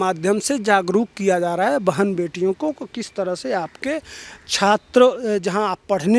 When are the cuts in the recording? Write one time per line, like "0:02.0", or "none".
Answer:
none